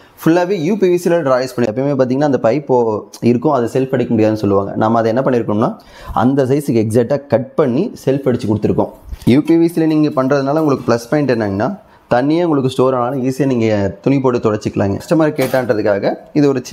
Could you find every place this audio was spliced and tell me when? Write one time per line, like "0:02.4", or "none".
0:01.7
0:09.1
0:15.0

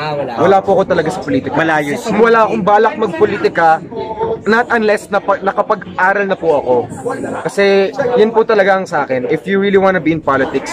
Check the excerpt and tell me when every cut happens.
none

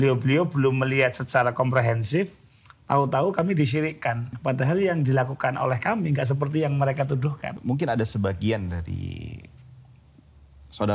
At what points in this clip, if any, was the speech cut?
0:04.3
0:07.5

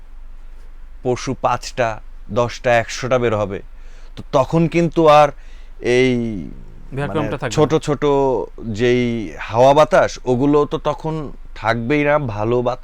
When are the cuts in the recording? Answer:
none

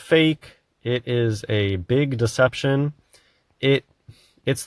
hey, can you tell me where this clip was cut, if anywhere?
none

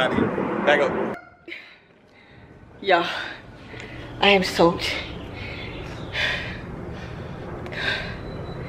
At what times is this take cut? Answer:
0:01.1

